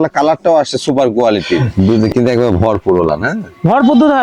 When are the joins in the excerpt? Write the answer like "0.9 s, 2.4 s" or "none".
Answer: 1.7 s